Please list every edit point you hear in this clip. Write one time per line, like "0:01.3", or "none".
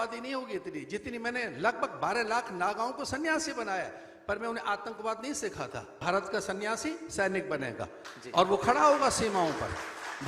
0:05.9